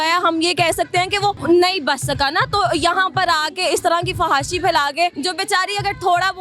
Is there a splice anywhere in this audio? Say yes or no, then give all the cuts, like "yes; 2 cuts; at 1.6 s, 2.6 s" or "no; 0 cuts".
yes; 2 cuts; at 1.4 s, 5.2 s